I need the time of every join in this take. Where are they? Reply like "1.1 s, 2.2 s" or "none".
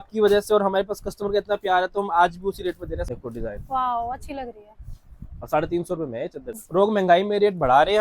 3.0 s, 6.6 s